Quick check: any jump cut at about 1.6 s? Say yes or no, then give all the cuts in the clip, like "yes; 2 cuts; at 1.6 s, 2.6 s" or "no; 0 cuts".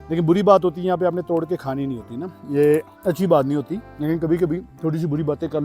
no; 3 cuts; at 2.9 s, 3.8 s, 4.7 s